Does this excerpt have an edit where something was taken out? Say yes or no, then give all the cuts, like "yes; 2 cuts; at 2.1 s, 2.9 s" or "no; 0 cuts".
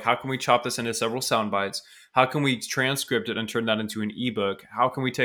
no; 0 cuts